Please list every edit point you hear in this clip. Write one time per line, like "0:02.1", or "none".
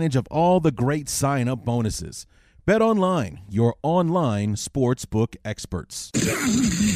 0:06.0